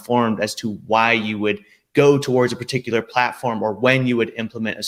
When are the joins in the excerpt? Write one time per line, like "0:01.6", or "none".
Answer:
none